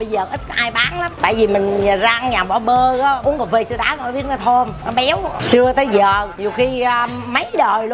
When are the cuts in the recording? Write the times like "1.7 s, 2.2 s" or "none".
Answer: 1.1 s, 3.2 s, 5.1 s, 6.3 s